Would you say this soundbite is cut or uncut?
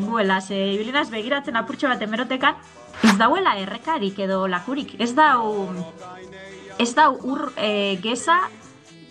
cut